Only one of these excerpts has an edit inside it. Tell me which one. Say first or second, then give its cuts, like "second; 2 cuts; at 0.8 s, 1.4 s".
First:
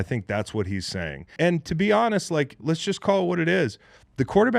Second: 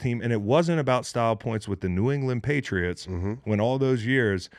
first; 1 cut; at 1.3 s